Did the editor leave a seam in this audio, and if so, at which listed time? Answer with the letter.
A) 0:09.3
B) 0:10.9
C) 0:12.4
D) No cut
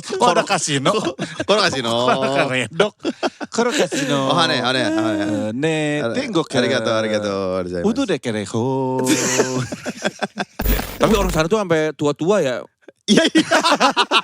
B